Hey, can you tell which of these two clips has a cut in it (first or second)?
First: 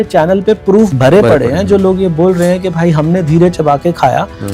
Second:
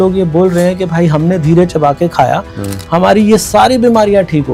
first